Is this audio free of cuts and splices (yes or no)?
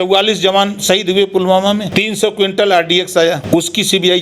no